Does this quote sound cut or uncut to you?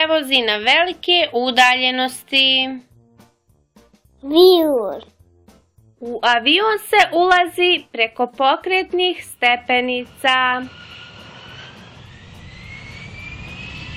uncut